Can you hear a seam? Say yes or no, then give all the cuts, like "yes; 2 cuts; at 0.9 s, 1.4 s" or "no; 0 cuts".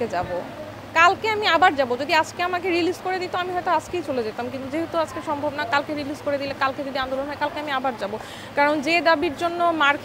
no; 0 cuts